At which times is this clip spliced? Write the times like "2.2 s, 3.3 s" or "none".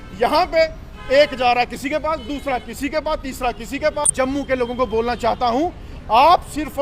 4.1 s